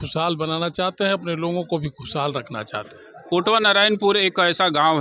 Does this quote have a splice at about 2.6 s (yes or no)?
no